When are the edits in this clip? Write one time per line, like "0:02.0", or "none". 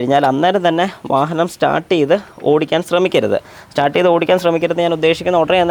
none

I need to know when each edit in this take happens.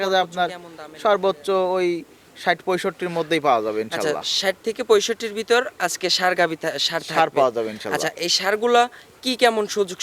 none

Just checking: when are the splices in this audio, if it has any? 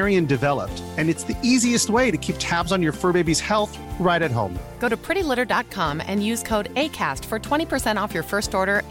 none

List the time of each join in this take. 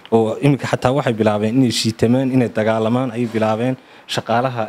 none

